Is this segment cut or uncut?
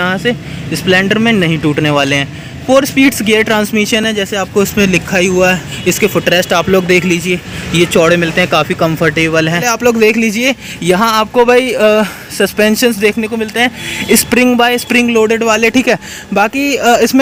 uncut